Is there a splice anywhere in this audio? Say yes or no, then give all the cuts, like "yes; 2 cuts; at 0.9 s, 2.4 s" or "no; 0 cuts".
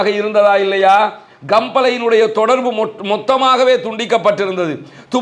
no; 0 cuts